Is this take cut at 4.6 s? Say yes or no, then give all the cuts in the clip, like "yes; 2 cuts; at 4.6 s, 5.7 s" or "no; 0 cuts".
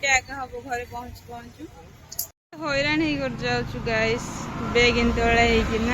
no; 1 cut; at 2.3 s